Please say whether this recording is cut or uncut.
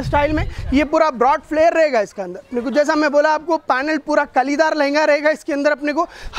uncut